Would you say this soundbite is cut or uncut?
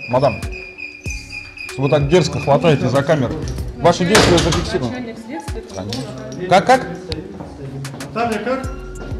uncut